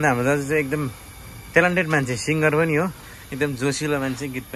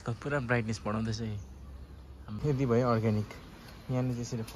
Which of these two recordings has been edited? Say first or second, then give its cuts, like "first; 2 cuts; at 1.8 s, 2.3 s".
second; 1 cut; at 2.4 s